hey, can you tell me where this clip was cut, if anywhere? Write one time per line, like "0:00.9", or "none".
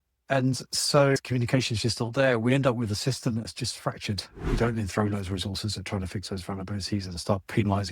0:01.2
0:04.4